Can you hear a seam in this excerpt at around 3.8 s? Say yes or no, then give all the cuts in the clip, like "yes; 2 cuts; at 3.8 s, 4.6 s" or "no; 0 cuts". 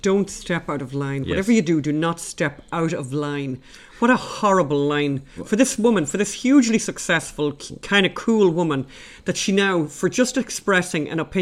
no; 0 cuts